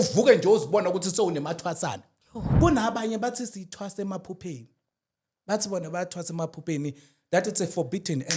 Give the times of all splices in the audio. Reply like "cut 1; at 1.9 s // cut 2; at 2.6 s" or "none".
cut 1; at 2.5 s